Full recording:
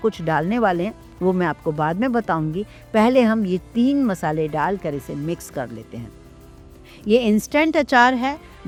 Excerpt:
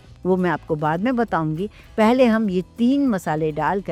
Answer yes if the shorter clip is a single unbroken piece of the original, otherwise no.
yes